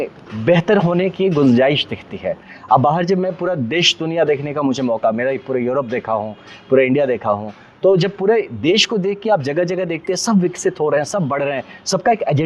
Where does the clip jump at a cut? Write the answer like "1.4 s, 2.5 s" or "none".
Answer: none